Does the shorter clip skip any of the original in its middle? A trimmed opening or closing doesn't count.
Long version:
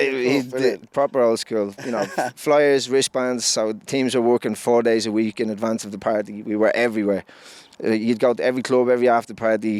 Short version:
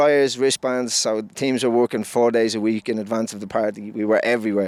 no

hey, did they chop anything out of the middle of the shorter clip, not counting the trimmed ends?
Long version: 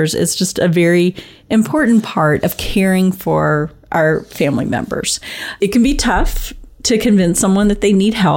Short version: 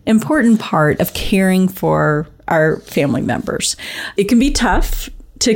no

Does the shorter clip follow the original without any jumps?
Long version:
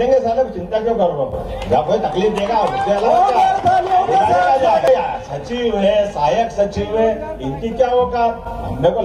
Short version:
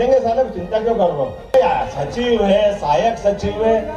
no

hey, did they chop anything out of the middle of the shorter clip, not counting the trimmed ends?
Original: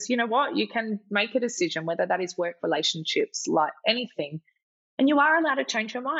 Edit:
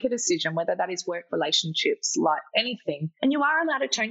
yes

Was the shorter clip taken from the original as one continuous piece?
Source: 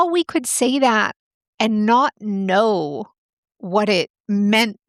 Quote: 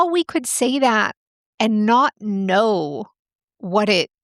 yes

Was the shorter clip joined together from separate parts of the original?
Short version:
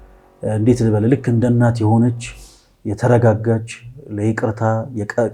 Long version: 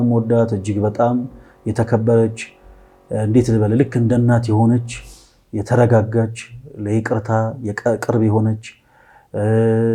no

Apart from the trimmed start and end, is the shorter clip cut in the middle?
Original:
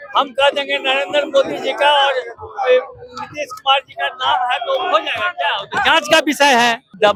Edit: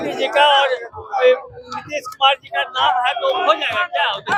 no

